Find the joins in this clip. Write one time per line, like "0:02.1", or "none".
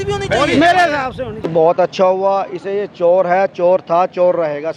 0:01.4